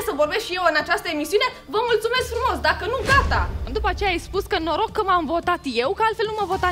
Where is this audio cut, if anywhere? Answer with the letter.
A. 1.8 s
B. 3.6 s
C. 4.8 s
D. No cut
B